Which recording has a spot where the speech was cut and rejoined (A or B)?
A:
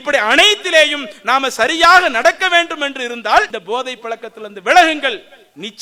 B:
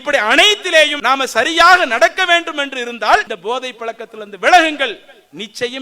B